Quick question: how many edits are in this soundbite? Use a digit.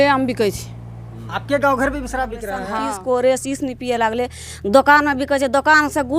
1